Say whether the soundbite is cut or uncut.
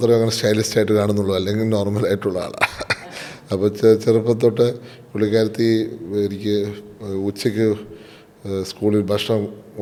uncut